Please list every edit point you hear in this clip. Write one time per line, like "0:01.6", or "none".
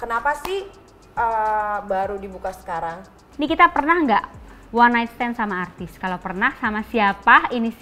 0:03.2